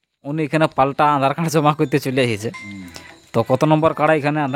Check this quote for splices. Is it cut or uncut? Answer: uncut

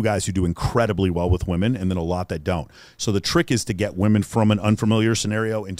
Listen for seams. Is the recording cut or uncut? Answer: uncut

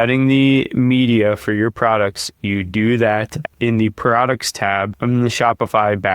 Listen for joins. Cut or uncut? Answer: cut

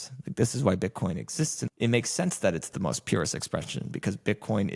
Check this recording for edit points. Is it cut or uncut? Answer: cut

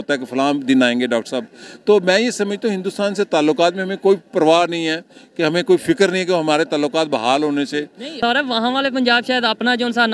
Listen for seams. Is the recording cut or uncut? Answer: cut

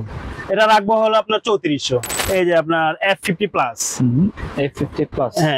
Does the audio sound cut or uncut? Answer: cut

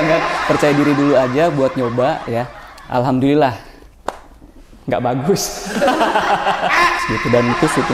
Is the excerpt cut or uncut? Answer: cut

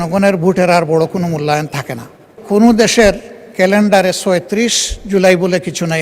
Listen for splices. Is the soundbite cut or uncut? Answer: cut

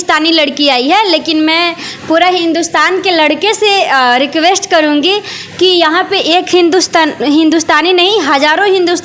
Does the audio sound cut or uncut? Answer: uncut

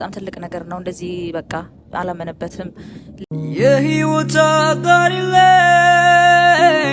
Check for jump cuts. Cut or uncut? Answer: cut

